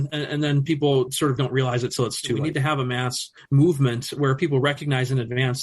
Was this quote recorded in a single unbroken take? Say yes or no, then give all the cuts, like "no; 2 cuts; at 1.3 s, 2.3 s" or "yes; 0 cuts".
no; 1 cut; at 2.4 s